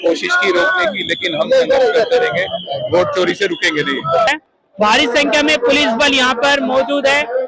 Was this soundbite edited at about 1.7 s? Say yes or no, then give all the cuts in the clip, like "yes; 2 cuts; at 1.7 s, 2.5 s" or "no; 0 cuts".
no; 1 cut; at 4.3 s